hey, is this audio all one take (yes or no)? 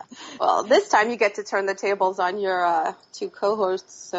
no